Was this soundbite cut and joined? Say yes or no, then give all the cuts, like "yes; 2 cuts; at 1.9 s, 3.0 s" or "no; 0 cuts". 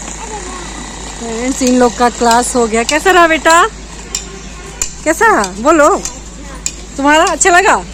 no; 0 cuts